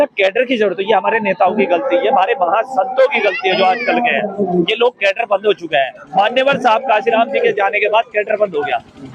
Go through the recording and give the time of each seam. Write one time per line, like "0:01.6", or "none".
none